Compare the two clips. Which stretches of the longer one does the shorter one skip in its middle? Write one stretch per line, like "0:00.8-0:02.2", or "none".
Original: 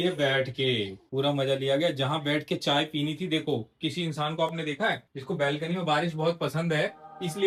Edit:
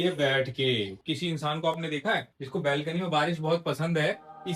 0:01.0-0:03.7